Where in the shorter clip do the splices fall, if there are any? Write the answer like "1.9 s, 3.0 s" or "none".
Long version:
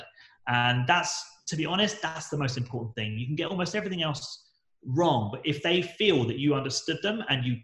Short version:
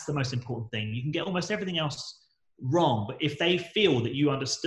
none